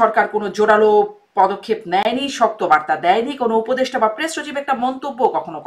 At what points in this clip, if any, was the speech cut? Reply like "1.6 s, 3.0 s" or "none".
none